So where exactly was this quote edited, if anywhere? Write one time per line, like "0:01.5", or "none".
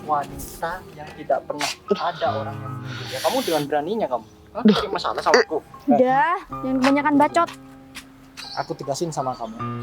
0:05.7